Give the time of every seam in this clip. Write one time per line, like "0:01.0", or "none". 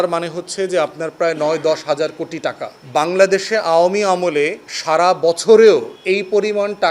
0:02.7
0:05.9